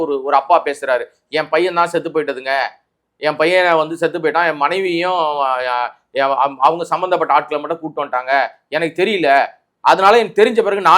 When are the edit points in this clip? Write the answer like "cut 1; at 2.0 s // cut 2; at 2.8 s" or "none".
none